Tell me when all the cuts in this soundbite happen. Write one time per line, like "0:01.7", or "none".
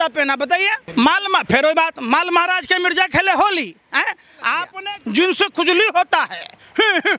0:00.8
0:04.7